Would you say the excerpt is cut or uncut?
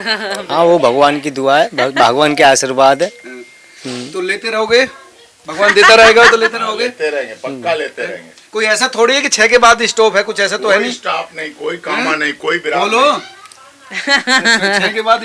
uncut